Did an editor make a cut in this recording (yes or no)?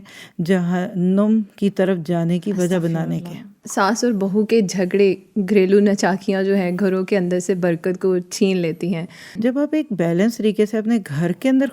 yes